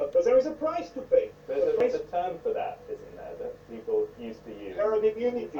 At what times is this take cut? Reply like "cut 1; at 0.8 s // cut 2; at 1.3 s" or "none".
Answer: cut 1; at 1.8 s